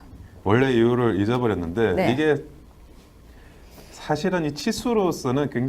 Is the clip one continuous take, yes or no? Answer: no